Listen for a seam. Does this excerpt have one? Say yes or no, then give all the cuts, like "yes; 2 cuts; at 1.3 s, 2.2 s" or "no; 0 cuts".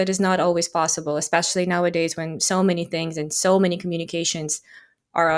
no; 0 cuts